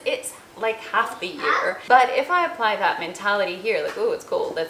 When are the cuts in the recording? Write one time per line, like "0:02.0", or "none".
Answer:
0:01.8